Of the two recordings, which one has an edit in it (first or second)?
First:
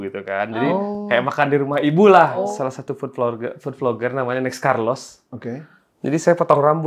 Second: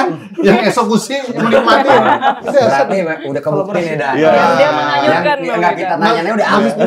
first